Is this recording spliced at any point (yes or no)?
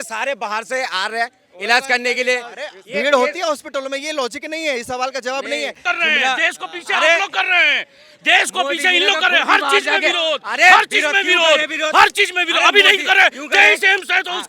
yes